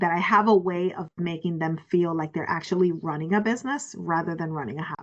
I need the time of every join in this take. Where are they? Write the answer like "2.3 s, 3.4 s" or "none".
none